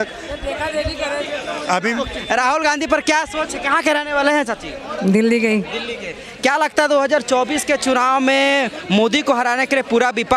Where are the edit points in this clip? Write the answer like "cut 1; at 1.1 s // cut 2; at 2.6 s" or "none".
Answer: none